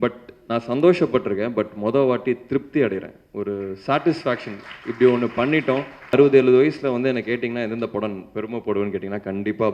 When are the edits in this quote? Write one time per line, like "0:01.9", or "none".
0:06.1